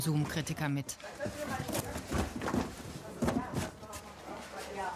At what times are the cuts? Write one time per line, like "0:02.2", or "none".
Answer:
0:03.9